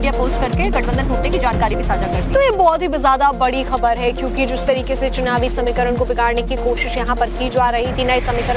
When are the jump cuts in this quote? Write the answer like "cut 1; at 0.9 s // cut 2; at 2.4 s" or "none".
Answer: none